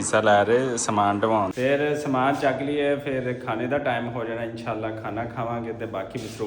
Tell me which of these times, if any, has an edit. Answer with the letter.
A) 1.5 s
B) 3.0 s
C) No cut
A